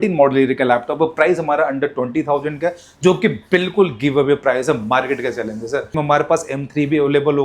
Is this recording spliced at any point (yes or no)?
yes